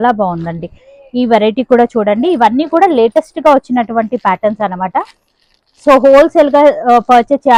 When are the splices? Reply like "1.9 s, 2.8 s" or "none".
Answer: none